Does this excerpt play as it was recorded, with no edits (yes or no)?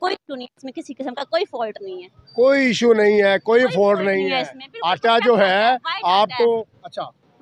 yes